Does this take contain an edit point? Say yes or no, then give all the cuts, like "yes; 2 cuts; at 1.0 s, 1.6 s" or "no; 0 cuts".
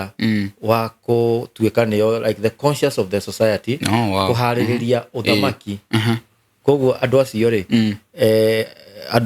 no; 0 cuts